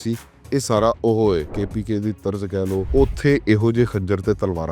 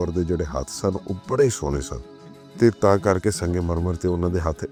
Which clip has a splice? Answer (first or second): first